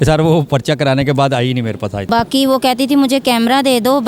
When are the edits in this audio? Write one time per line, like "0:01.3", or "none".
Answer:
0:02.1